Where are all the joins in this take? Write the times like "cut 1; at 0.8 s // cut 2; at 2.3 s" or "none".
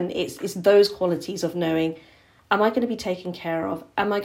none